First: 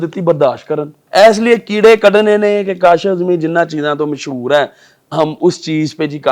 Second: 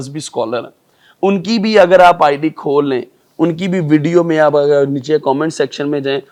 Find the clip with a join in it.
first; 1 cut; at 1.0 s

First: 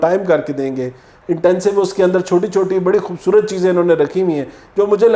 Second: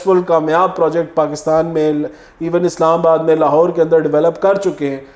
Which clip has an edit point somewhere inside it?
first; 1 cut; at 1.1 s

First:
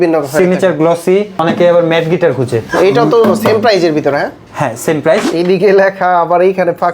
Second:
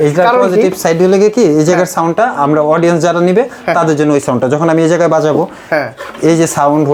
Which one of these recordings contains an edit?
first; 1 cut; at 5.3 s

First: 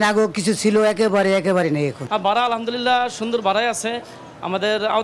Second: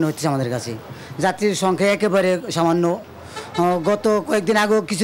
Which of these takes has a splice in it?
first; 1 cut; at 2.0 s

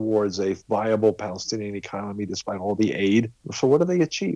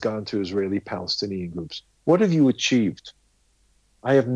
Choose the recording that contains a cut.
first; 1 cut; at 3.4 s

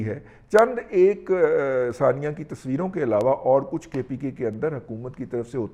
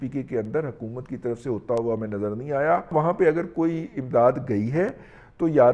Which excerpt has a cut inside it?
second; 1 cut; at 2.9 s

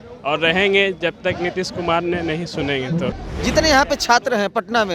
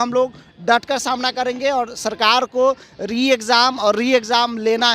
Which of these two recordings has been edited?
first; 1 cut; at 3.2 s

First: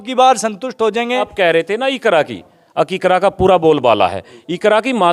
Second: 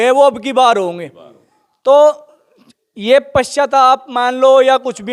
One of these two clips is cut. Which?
first; 1 cut; at 1.3 s

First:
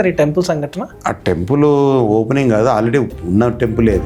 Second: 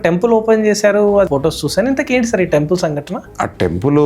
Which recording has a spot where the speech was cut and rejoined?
second; 1 cut; at 1.3 s

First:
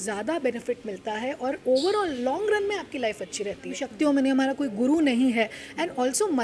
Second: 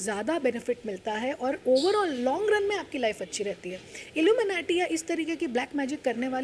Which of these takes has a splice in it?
first; 1 cut; at 3.8 s

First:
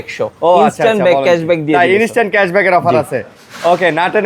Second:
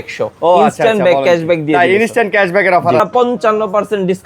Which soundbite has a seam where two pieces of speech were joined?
second; 1 cut; at 3.0 s

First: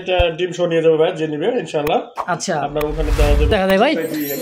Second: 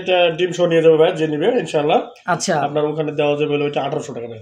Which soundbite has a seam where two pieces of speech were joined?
first; 1 cut; at 3.5 s

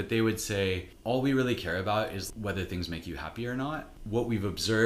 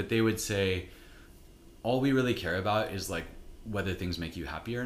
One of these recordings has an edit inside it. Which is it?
first; 3 cuts; at 0.9 s, 2.2 s, 3.9 s

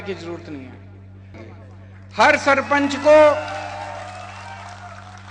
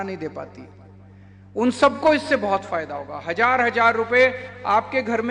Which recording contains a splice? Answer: first; 1 cut; at 1.4 s

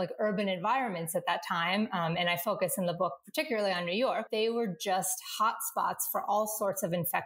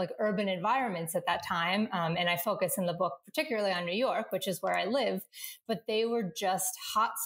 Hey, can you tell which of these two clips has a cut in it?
first; 1 cut; at 4.3 s

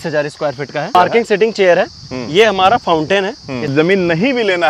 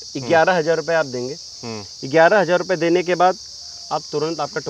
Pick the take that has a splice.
first; 2 cuts; at 0.9 s, 3.7 s

